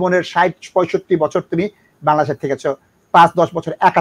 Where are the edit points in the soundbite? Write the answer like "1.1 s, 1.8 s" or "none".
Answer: none